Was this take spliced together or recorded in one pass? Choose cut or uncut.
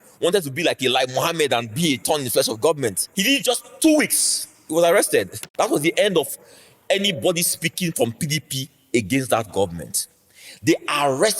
cut